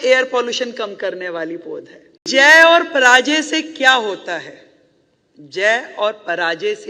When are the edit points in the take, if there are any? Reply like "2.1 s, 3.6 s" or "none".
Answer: 2.2 s